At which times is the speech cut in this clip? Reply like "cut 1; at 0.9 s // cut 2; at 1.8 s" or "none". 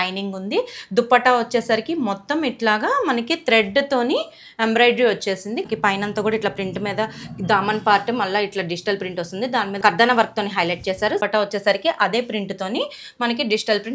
cut 1; at 5.7 s // cut 2; at 9.8 s // cut 3; at 11.2 s